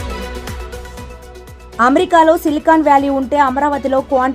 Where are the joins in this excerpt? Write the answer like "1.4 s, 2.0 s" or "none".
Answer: 1.5 s